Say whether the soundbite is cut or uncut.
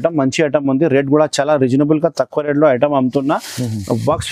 uncut